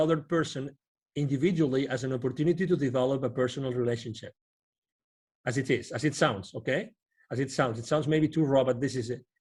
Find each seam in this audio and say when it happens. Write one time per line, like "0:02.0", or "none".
none